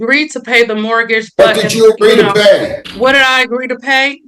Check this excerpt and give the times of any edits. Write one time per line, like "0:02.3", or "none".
0:02.8